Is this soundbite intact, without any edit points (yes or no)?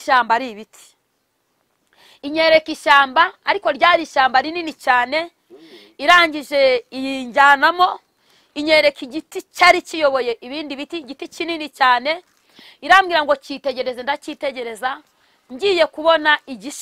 yes